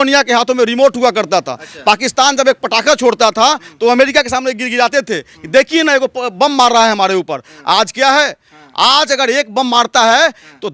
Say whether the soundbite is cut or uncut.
uncut